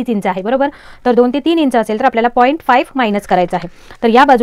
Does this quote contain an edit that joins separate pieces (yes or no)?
no